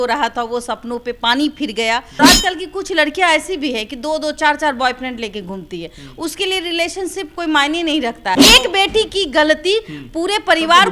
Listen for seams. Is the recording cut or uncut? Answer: cut